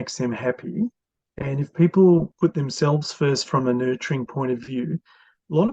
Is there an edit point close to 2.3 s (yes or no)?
yes